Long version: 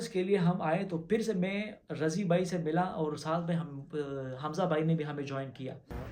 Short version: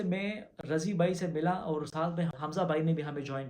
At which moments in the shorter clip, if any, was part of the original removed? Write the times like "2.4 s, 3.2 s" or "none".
2.4 s

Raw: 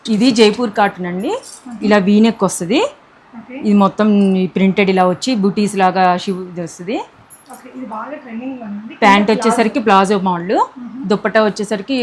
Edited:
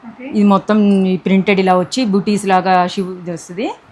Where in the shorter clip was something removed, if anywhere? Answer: none

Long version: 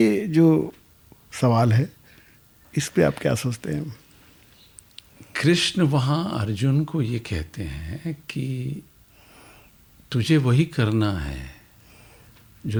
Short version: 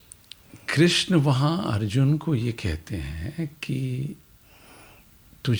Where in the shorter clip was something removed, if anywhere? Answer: none

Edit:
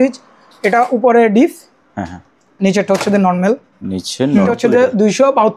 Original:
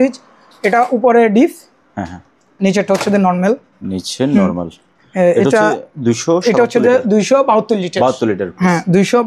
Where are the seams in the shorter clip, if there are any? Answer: 4.5 s

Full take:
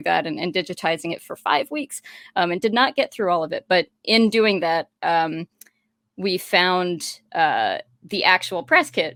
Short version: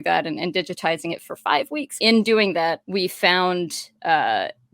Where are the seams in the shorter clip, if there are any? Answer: 1.9 s, 2.8 s

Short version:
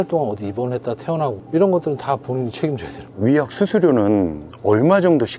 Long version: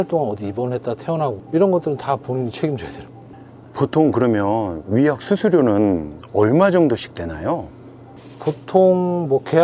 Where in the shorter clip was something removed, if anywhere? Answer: 3.1 s

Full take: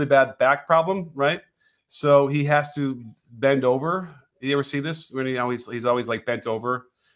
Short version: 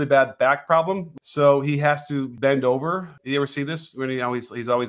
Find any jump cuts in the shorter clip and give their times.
1.1 s, 2.3 s, 3.1 s

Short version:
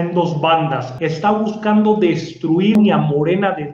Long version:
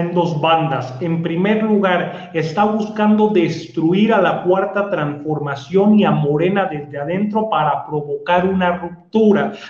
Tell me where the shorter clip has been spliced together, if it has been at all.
0.9 s, 2.8 s

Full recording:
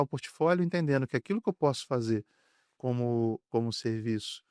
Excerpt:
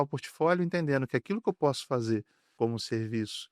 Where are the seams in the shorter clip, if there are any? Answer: 2.5 s

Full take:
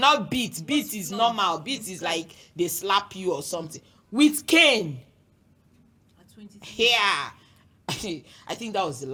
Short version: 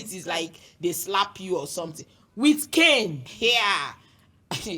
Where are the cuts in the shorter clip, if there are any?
3.3 s

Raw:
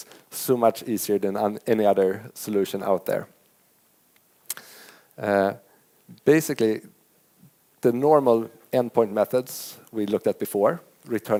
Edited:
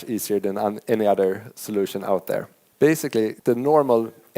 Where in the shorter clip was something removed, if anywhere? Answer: 2.6 s, 3.4 s

